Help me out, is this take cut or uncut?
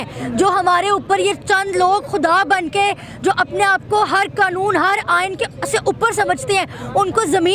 uncut